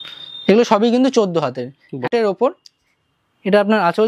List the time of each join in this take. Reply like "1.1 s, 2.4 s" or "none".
2.0 s